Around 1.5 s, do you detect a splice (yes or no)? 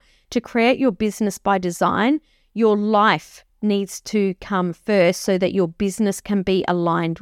no